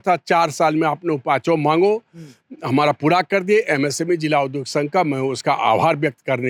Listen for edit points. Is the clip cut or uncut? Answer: uncut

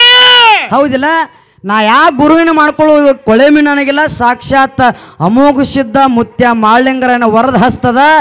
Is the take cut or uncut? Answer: uncut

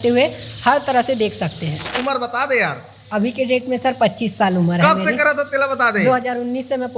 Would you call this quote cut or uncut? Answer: cut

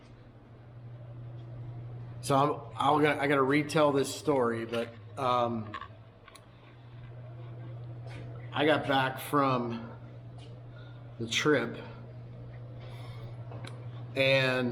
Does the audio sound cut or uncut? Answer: uncut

